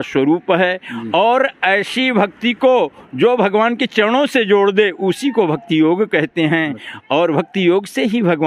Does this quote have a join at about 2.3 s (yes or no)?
no